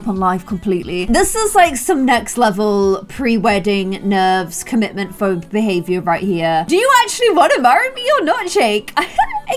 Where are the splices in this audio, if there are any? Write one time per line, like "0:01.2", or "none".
0:01.0
0:06.6